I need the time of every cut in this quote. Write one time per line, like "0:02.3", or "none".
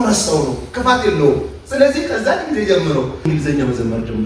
0:03.3